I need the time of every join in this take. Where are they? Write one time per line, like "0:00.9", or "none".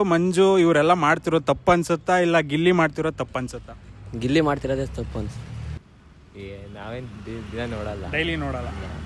0:05.6